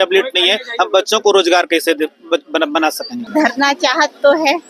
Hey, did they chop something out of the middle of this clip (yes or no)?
yes